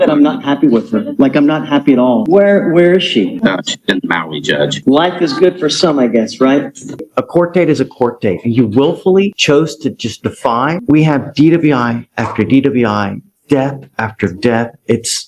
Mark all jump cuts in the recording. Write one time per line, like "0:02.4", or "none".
0:02.2
0:04.8
0:07.0
0:10.8

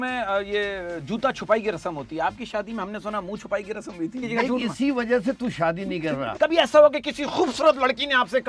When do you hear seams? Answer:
0:04.2
0:06.3

